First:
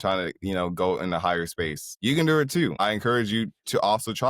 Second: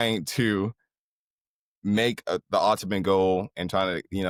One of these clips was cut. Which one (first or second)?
first